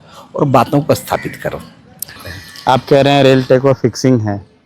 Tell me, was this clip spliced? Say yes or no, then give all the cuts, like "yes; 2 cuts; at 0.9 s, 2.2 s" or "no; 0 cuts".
yes; 1 cut; at 2.3 s